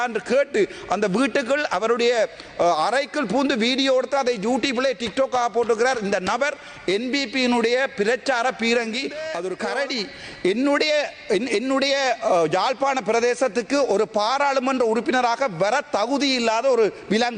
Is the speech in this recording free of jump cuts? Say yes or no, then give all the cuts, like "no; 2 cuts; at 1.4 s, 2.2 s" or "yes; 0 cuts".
no; 1 cut; at 9.5 s